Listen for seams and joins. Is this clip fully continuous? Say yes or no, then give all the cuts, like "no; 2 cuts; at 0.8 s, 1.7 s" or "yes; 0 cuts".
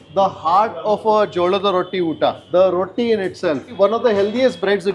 no; 1 cut; at 3.8 s